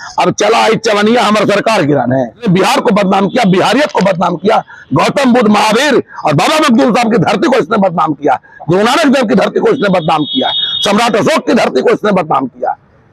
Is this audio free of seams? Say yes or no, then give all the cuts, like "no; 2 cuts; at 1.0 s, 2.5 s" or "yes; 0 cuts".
no; 1 cut; at 2.5 s